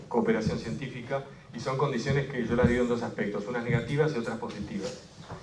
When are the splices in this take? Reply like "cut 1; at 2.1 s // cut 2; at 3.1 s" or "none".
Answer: cut 1; at 3.4 s